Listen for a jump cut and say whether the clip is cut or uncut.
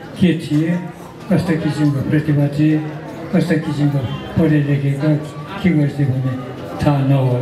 uncut